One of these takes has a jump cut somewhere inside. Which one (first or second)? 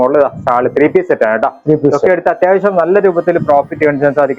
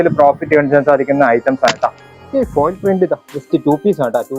second